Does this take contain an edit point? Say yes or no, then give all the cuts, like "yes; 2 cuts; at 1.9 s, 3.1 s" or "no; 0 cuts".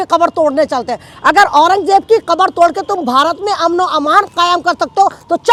no; 0 cuts